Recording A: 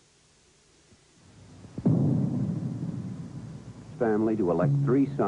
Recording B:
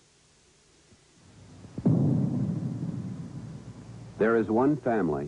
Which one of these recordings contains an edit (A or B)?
B